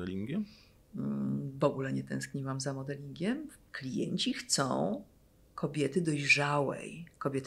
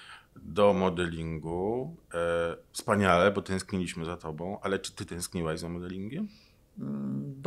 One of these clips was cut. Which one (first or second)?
first